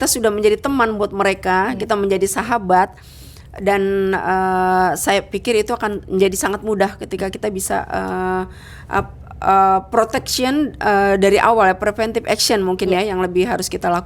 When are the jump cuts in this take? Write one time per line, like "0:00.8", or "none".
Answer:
none